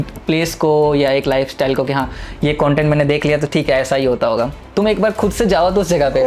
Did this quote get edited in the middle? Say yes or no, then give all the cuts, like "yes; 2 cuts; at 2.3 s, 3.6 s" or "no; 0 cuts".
no; 0 cuts